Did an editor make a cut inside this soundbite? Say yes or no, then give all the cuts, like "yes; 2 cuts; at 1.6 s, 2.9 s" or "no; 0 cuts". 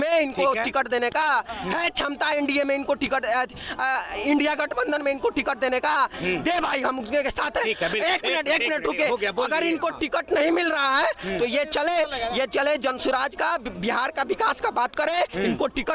no; 0 cuts